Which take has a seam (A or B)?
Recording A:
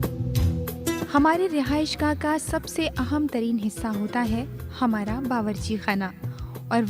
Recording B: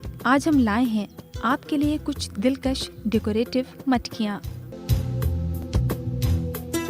B